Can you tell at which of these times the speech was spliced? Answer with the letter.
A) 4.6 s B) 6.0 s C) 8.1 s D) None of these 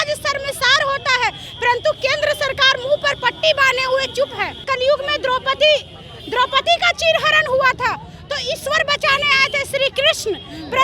A